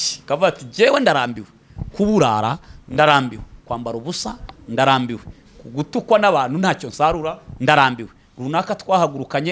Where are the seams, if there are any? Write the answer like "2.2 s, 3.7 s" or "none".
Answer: none